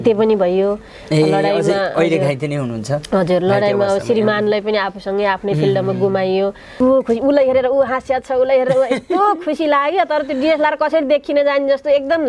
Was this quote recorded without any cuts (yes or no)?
no